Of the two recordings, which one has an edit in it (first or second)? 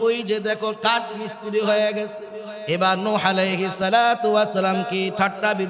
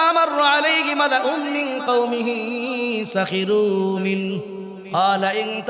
first